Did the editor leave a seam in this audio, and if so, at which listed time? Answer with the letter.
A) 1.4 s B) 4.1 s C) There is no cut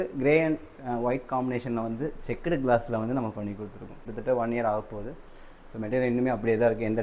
B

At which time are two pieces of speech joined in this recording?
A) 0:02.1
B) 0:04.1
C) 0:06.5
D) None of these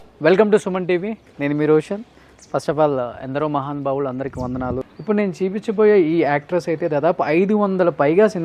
D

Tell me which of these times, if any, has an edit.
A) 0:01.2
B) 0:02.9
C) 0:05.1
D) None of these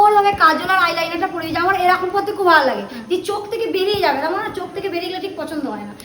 D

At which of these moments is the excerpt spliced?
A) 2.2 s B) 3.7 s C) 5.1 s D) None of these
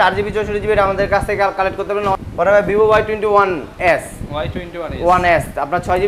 A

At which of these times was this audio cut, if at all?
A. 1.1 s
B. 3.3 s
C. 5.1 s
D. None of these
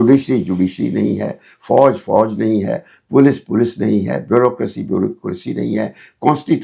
D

